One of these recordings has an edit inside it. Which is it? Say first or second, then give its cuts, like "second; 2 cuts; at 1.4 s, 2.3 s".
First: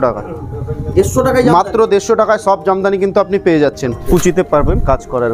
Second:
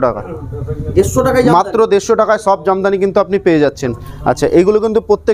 first; 1 cut; at 4.0 s